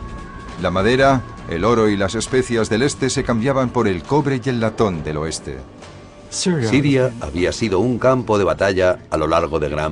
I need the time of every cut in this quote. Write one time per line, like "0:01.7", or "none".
0:07.5